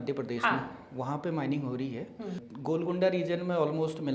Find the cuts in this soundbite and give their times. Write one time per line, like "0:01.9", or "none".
0:02.5